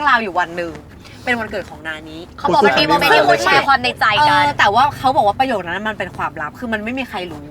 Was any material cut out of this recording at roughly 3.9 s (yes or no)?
no